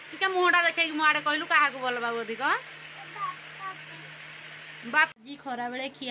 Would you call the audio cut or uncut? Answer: cut